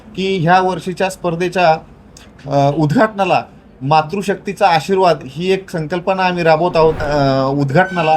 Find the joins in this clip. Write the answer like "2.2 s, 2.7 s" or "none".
7.0 s